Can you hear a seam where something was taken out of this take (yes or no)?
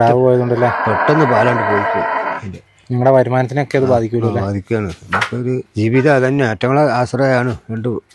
yes